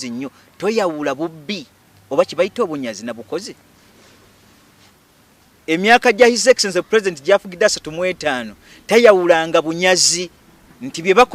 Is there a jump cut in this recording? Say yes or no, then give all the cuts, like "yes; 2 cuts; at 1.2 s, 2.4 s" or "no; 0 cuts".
no; 0 cuts